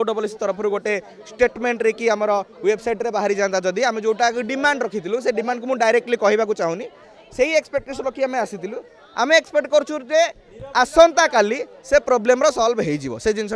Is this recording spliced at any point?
no; 0 cuts

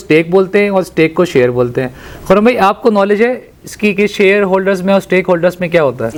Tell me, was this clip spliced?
no; 0 cuts

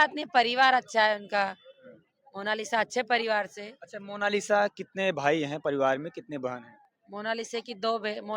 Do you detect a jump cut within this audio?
no; 0 cuts

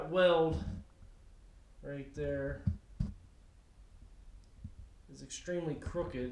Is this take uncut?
yes; 0 cuts

